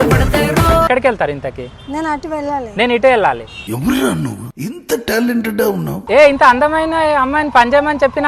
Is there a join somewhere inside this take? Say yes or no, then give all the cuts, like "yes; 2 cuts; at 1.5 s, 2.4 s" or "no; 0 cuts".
yes; 2 cuts; at 0.9 s, 6.0 s